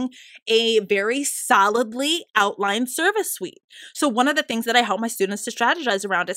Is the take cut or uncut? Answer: uncut